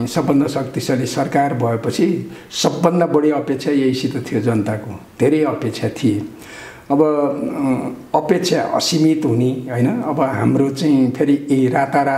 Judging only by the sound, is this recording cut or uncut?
uncut